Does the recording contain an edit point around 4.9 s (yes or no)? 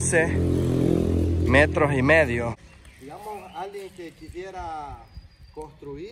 no